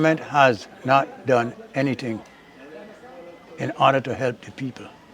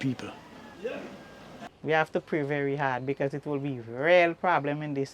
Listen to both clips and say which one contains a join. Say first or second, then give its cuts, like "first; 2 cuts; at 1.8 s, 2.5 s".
second; 1 cut; at 1.6 s